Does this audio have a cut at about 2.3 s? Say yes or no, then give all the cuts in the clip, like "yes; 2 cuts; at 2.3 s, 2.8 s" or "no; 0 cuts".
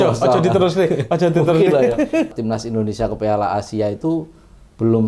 yes; 1 cut; at 2.3 s